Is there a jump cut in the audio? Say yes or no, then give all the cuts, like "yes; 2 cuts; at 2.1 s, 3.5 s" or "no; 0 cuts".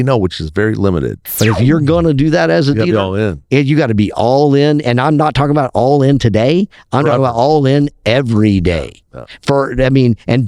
yes; 1 cut; at 1.2 s